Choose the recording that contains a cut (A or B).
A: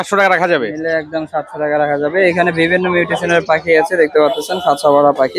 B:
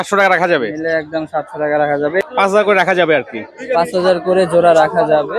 B